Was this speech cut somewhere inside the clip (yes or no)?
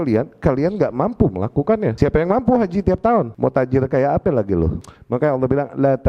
yes